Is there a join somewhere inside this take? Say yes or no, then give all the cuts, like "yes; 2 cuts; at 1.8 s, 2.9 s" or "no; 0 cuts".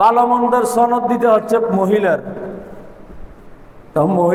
no; 0 cuts